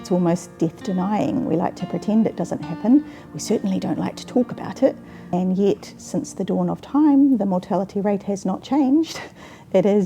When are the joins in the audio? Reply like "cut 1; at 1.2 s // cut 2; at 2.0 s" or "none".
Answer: cut 1; at 5.2 s